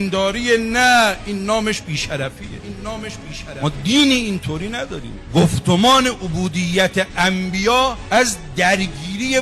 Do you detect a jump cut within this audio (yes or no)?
no